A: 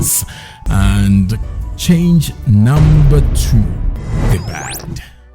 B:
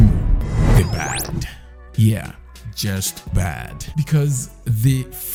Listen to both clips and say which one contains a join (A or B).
A